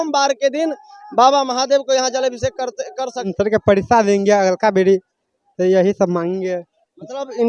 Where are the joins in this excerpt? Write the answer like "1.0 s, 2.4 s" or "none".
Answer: 3.3 s